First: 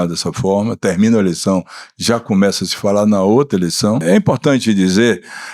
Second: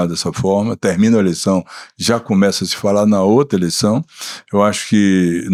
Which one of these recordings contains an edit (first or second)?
first